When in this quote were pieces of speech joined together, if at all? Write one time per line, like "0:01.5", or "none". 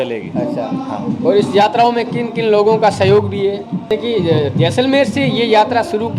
0:03.8

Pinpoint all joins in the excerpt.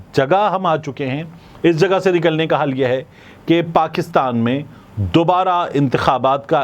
none

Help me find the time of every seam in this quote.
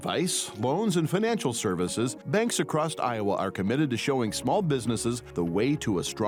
none

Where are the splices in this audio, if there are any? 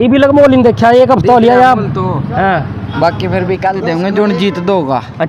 0:03.7

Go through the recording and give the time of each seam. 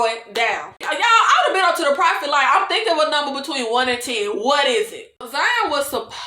0:00.8
0:05.3

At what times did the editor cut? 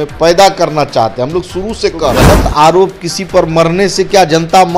0:02.3

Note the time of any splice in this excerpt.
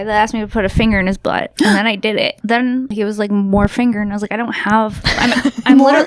0:02.5

